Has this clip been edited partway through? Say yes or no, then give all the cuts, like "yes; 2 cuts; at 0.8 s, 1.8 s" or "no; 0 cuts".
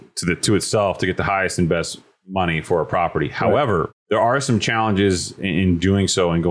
yes; 1 cut; at 4.0 s